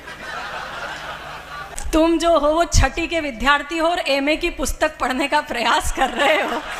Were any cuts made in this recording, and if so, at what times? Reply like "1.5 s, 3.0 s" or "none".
1.8 s

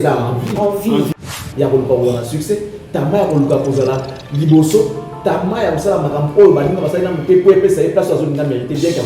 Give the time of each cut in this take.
1.1 s

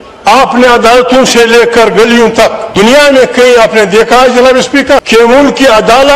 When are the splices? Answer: 2.6 s, 5.0 s

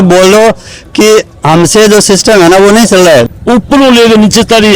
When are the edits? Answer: 3.4 s

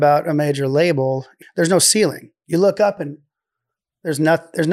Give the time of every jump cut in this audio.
1.3 s

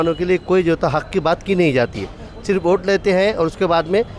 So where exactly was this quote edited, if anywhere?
none

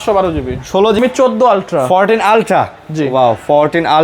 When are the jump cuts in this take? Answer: 1.0 s

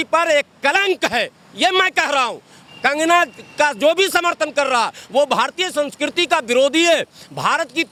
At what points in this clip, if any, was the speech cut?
none

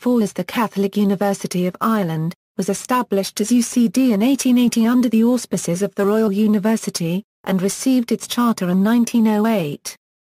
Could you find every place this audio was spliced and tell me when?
2.0 s

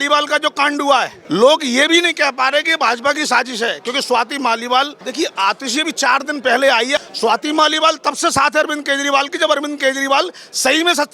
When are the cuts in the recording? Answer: 1.2 s, 5.0 s, 7.0 s

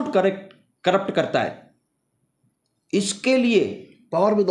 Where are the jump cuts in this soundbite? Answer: none

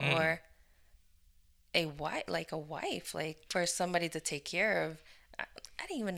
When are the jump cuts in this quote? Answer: 3.4 s

